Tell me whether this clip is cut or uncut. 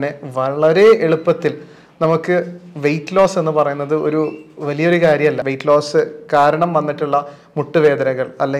cut